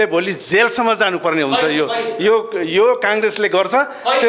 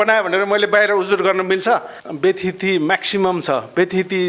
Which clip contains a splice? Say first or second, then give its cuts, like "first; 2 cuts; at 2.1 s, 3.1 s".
second; 1 cut; at 2.0 s